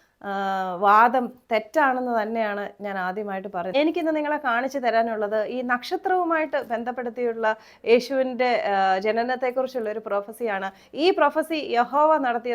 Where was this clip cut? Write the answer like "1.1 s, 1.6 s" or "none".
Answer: 3.7 s